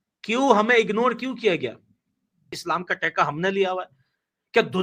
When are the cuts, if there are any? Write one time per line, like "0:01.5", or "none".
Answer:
0:02.6